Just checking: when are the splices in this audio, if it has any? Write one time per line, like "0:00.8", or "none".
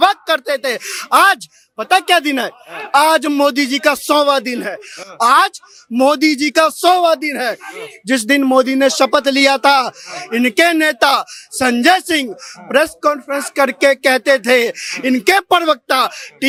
none